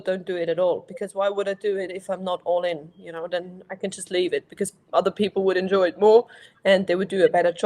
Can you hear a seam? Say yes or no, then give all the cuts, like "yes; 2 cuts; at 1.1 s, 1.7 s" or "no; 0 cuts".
no; 0 cuts